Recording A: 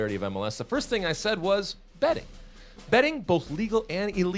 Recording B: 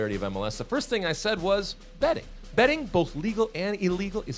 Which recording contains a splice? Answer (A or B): B